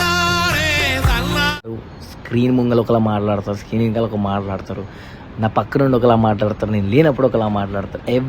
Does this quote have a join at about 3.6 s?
no; 1 cut; at 1.8 s

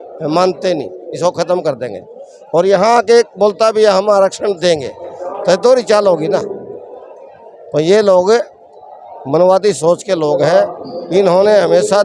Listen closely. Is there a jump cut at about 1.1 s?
no; 0 cuts

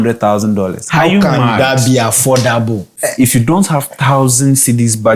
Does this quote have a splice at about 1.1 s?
no; 1 cut; at 3.0 s

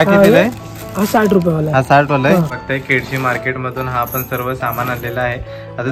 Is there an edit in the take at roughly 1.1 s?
no; 1 cut; at 2.5 s

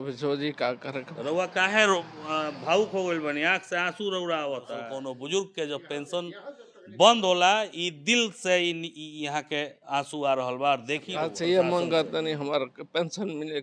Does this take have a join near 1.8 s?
no; 2 cuts; at 4.8 s, 11.2 s

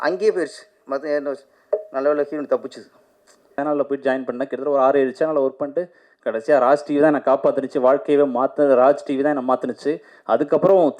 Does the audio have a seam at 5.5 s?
no; 1 cut; at 3.6 s

